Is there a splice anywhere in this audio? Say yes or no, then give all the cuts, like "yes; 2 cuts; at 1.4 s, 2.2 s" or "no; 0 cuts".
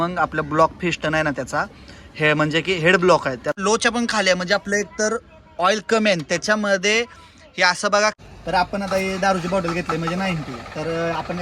yes; 2 cuts; at 3.5 s, 8.2 s